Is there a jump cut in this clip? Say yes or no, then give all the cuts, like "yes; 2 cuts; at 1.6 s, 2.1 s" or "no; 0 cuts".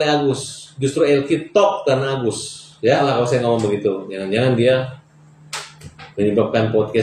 yes; 1 cut; at 3.0 s